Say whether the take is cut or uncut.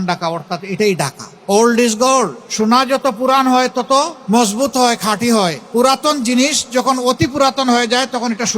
cut